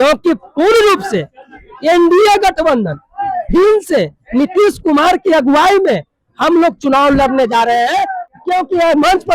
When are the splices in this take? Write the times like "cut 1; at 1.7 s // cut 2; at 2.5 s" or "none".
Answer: cut 1; at 8.3 s

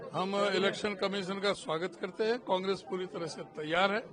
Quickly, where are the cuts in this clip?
none

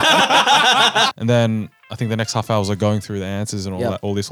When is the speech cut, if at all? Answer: cut 1; at 1.1 s

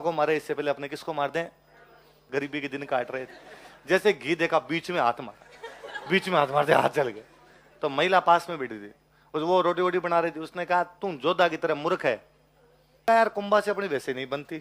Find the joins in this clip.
cut 1; at 2.1 s // cut 2; at 13.0 s

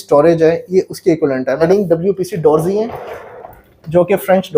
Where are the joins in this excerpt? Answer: cut 1; at 1.6 s

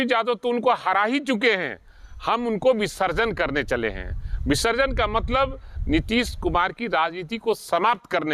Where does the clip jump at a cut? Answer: none

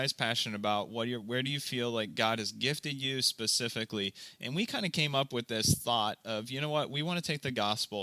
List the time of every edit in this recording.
none

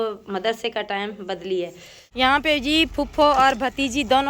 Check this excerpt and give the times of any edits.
cut 1; at 2.0 s

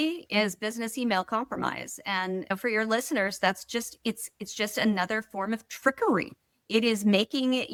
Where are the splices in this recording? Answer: none

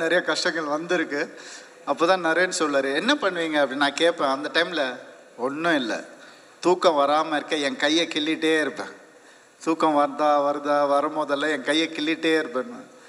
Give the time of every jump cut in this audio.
none

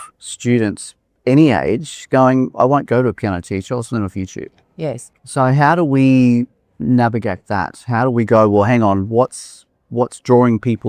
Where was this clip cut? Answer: none

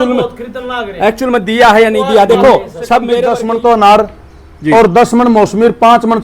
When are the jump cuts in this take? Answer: cut 1; at 3.2 s

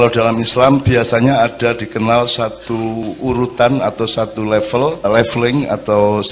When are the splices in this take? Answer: cut 1; at 5.1 s

